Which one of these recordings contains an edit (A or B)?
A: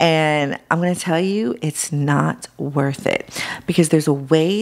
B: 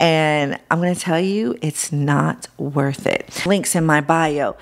B